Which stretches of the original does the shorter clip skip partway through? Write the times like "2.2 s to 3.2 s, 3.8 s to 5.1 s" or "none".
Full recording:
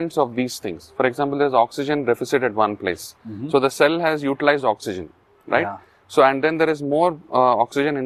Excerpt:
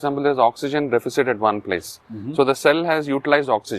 none